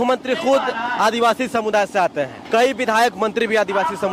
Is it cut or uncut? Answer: uncut